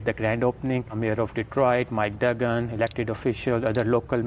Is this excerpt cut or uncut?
uncut